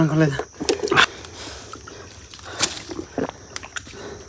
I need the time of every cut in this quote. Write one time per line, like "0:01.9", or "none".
0:01.1
0:03.1

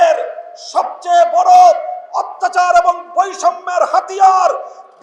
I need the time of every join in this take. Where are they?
none

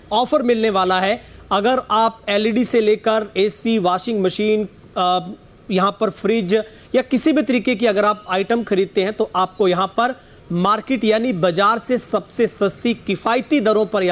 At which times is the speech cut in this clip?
none

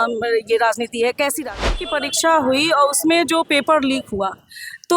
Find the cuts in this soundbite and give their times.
0:01.8

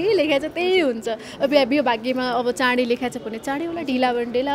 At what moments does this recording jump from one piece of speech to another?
none

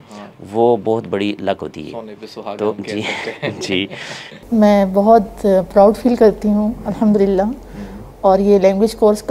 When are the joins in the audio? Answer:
0:04.4

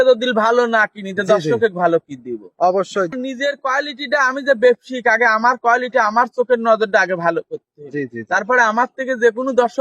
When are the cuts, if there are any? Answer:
0:03.1

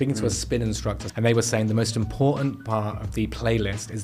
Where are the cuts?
0:01.0

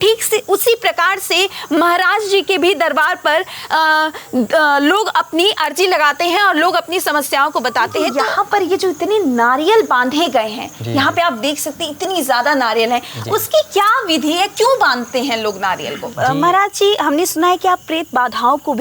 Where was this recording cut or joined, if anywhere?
0:08.1
0:16.0

